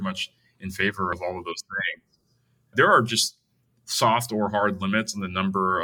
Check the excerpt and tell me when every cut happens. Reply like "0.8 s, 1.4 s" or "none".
1.1 s, 2.7 s